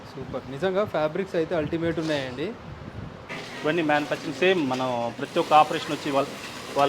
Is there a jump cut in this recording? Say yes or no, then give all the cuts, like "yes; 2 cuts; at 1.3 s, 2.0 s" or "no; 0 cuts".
yes; 1 cut; at 3.4 s